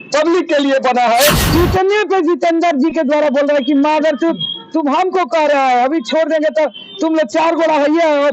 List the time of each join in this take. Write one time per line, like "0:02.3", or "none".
0:01.4